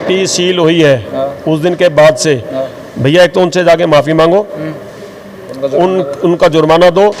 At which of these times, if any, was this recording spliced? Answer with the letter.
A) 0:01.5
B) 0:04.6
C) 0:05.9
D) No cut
D